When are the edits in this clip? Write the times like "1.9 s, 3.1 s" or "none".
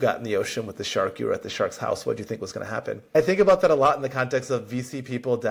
3.2 s